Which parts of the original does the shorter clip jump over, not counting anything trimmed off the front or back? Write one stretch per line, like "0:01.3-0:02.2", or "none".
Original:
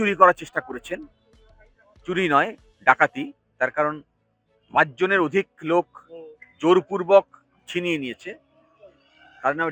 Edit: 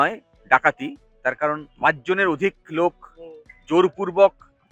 0:04.0-0:04.6